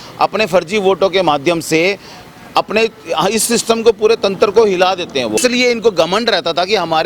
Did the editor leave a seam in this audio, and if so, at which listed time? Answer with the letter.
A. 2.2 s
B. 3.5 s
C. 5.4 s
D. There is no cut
C